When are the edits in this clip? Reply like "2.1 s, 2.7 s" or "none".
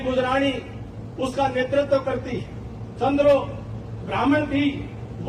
none